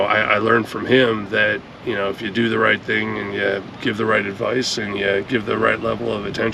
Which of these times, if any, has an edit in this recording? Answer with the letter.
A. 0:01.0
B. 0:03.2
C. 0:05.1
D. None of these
D